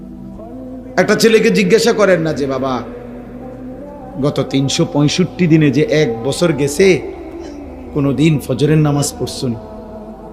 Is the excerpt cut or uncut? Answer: cut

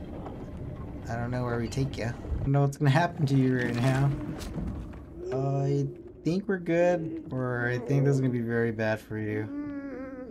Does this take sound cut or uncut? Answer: cut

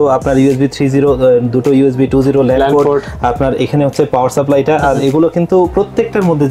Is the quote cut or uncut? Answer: uncut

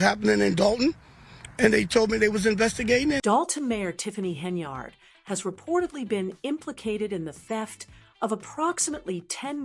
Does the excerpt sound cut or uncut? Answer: cut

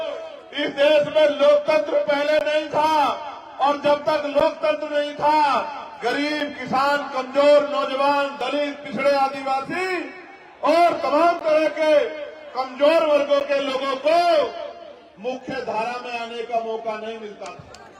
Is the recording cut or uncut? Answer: uncut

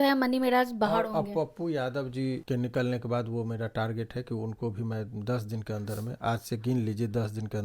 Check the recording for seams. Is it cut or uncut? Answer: cut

